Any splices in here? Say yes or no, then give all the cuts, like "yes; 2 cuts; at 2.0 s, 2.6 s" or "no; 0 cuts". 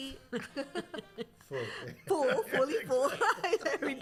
no; 0 cuts